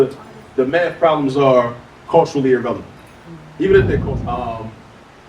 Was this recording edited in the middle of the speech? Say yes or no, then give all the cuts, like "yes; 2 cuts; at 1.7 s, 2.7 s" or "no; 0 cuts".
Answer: yes; 1 cut; at 4.0 s